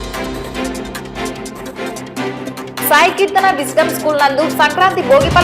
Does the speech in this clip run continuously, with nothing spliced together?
no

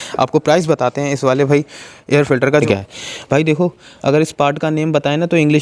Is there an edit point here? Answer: yes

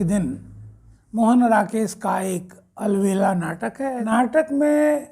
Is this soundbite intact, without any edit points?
no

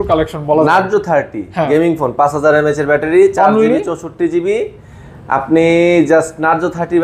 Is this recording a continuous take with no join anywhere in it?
yes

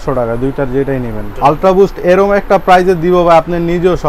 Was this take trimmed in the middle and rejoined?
yes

